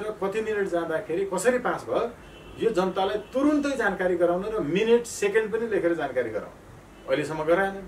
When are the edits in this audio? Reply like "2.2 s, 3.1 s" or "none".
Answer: none

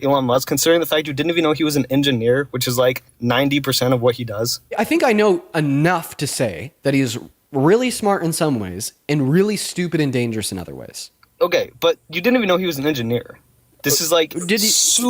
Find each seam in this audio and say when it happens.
4.8 s

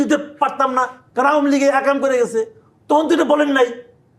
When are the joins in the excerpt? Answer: 1.0 s

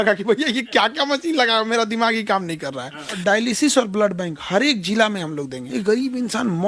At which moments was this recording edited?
3.1 s, 5.6 s

